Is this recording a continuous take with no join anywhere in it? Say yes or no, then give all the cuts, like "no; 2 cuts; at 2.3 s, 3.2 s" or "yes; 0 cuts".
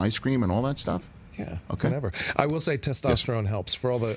yes; 0 cuts